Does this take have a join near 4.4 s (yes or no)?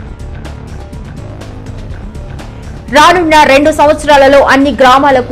no